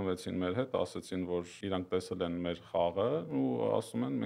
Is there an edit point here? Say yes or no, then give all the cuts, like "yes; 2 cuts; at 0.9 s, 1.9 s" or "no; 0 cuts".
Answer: yes; 2 cuts; at 1.5 s, 3.3 s